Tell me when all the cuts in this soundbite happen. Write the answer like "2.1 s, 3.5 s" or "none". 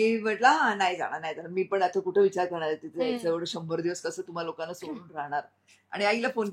none